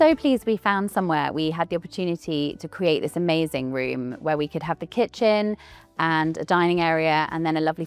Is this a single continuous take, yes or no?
yes